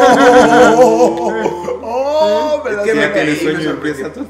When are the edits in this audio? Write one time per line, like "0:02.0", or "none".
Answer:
none